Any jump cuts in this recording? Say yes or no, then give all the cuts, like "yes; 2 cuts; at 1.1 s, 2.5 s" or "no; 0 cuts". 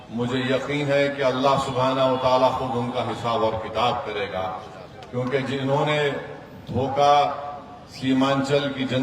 no; 0 cuts